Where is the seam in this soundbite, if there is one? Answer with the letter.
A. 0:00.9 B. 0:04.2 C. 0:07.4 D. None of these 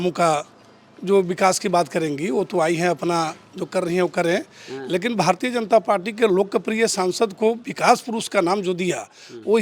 D